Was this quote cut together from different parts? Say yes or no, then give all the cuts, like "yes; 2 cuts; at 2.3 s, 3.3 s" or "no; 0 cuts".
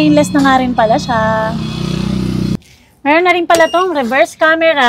yes; 1 cut; at 2.7 s